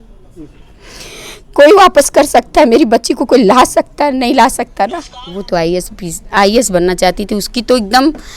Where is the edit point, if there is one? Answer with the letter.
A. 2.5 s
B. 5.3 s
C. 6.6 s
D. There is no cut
B